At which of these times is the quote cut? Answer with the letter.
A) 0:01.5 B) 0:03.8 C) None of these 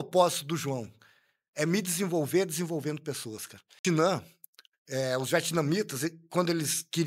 B